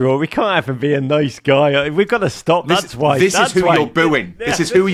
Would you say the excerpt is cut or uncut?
uncut